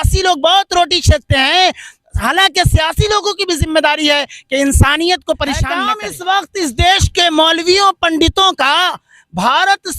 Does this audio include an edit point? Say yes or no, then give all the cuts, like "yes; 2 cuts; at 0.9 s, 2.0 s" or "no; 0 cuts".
yes; 1 cut; at 5.7 s